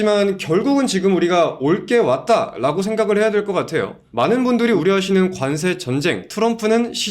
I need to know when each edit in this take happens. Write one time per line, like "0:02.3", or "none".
0:04.0
0:04.8